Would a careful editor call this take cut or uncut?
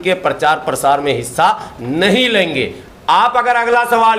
uncut